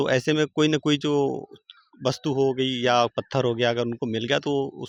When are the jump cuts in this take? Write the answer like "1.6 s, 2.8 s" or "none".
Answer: none